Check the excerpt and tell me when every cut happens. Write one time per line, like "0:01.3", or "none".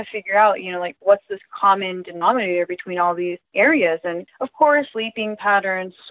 0:03.5
0:04.3
0:04.9